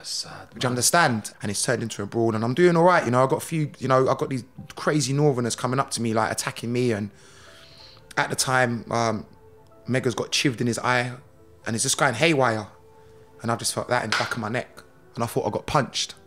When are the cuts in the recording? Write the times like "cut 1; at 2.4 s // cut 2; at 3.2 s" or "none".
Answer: cut 1; at 1.3 s